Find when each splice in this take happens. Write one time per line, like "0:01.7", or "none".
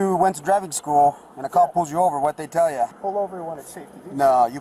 0:03.0